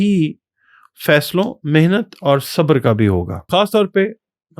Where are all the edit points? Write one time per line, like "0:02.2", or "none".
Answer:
0:03.4